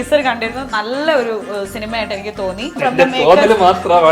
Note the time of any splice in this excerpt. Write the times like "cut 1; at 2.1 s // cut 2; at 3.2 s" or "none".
cut 1; at 2.8 s